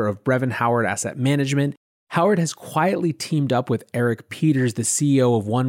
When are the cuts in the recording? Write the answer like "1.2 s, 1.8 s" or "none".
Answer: 1.9 s